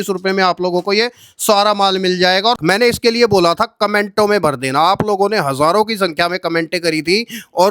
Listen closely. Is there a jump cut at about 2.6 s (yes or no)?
yes